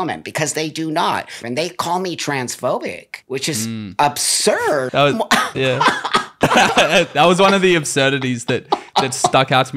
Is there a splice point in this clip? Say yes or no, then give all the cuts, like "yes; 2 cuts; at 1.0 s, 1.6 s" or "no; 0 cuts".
yes; 4 cuts; at 1.4 s, 3.1 s, 4.9 s, 6.4 s